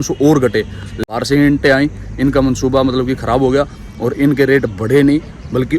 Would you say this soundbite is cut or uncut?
cut